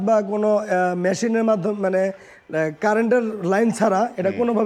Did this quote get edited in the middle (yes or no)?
no